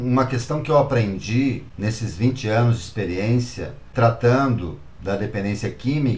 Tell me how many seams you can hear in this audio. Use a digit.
2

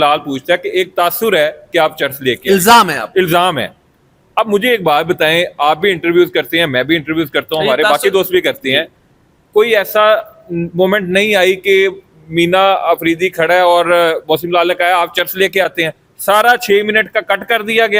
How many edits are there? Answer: 0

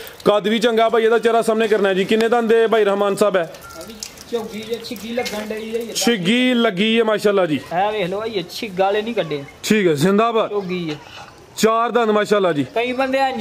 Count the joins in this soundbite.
1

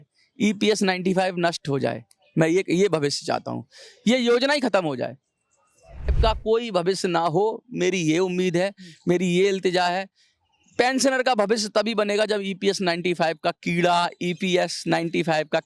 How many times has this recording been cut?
1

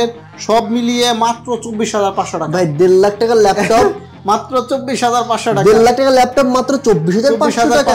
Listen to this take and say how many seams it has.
0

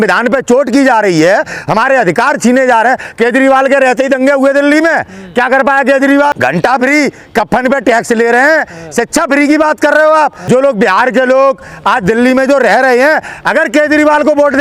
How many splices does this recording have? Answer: 2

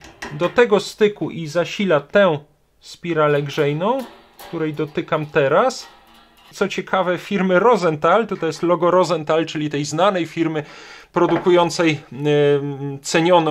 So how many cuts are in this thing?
1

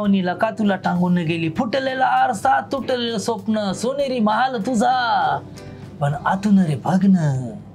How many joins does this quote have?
0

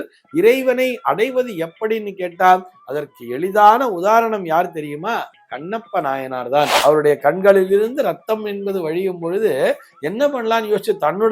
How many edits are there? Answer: 1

